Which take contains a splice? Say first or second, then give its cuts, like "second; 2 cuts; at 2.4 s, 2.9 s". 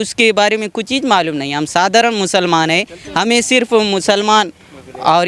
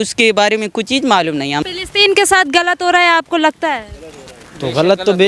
second; 1 cut; at 1.7 s